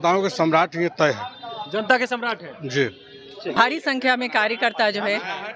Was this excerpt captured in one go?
no; 1 cut; at 3.6 s

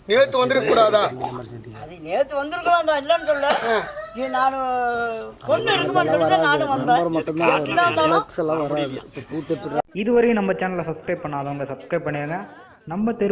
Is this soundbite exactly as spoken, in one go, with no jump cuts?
no; 1 cut; at 9.8 s

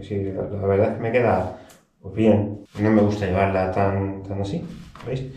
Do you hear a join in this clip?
yes; 1 cut; at 2.6 s

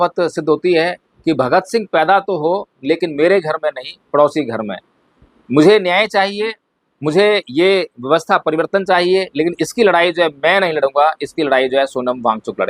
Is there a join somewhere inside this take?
no; 0 cuts

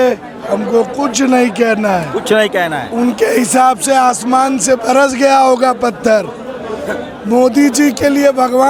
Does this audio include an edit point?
no; 0 cuts

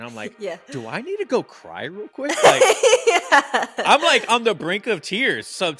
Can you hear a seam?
no; 0 cuts

